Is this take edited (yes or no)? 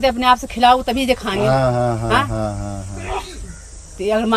no